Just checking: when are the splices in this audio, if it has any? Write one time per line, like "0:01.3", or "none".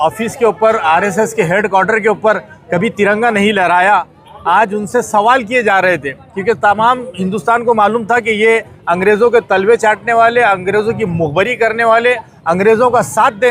none